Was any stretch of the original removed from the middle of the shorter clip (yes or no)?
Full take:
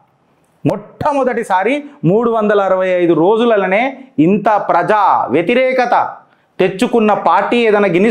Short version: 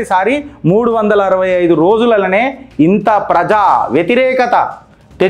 no